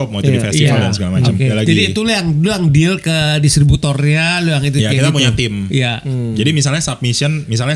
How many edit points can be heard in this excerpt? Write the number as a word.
one